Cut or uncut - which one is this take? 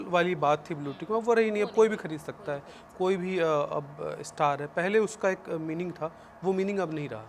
uncut